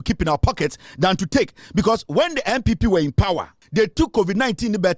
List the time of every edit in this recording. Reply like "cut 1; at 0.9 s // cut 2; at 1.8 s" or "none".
cut 1; at 3.6 s